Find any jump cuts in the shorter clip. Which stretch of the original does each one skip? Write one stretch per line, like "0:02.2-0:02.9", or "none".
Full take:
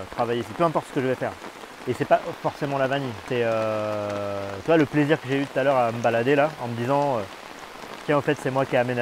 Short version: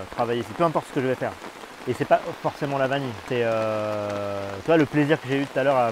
none